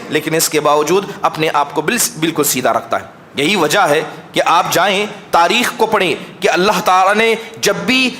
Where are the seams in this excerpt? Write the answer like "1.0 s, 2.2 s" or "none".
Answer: none

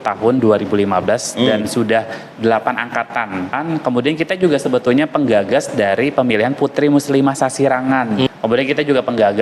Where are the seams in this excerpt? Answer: 3.5 s, 8.3 s

